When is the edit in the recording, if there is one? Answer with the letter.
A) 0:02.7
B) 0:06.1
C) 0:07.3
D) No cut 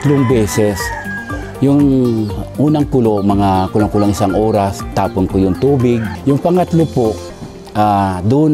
B